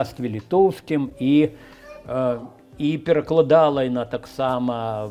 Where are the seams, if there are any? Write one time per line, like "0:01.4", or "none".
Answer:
none